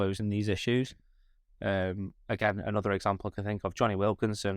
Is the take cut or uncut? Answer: uncut